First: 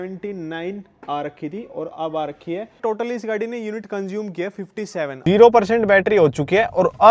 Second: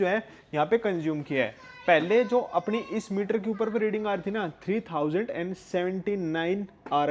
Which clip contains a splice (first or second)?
first